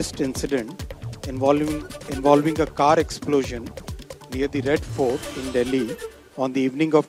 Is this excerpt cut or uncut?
uncut